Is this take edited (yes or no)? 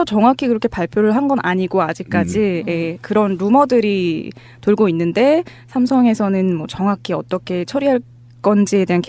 yes